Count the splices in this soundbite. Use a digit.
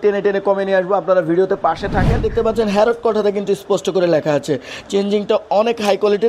1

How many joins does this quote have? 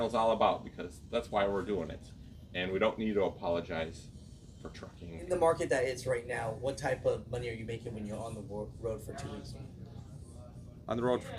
1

